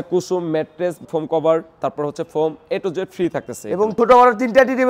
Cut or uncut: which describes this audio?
uncut